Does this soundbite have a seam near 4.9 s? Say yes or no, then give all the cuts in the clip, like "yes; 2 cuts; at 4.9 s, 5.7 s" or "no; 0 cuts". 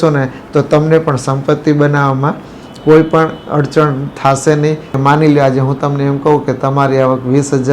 yes; 1 cut; at 4.9 s